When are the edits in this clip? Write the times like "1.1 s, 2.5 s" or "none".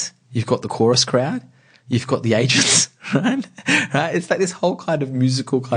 none